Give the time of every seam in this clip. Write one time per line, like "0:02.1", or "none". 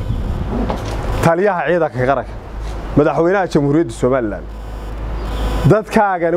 none